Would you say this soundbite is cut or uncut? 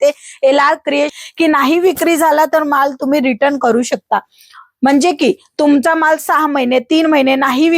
cut